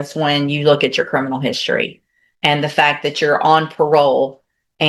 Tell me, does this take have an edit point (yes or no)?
no